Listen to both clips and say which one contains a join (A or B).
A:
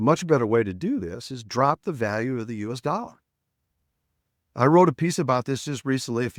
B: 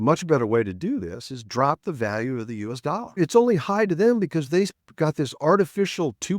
B